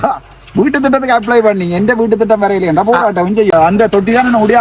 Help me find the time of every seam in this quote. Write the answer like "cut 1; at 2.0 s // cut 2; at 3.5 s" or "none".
cut 1; at 3.5 s